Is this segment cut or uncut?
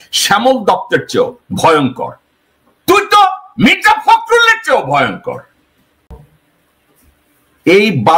cut